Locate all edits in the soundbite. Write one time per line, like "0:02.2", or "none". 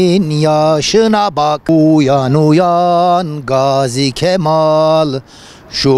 0:01.7

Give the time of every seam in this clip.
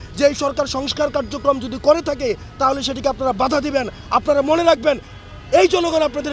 none

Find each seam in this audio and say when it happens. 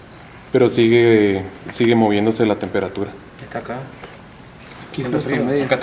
none

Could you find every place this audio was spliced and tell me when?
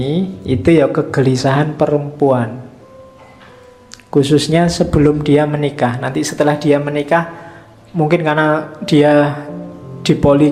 none

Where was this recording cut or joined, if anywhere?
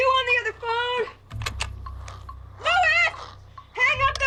none

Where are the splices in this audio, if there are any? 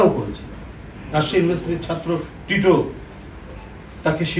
none

